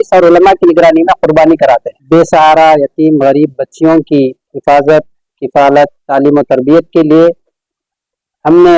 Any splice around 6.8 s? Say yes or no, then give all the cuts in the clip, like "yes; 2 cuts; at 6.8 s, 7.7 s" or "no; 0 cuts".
no; 1 cut; at 1.9 s